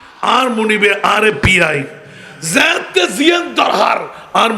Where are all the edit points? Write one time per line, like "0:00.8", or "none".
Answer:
none